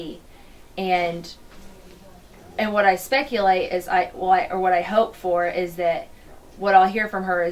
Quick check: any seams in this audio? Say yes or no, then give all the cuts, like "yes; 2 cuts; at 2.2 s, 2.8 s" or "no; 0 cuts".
yes; 1 cut; at 3.6 s